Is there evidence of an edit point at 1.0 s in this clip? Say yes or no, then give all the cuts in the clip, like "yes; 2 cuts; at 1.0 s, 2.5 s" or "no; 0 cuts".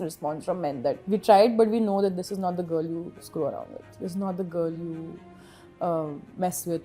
yes; 1 cut; at 1.0 s